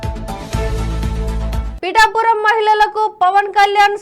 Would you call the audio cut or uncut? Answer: cut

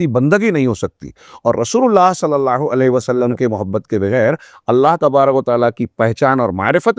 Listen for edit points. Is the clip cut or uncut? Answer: uncut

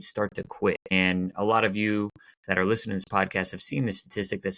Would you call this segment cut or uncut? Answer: cut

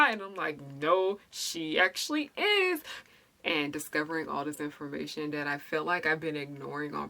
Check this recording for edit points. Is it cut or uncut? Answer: cut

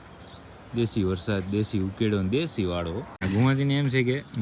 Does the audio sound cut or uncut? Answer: cut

